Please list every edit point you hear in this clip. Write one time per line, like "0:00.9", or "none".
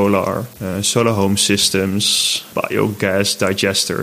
none